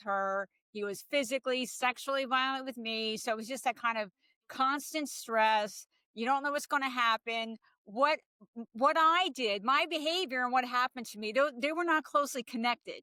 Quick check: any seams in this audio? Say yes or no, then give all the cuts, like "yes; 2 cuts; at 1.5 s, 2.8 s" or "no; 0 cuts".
no; 0 cuts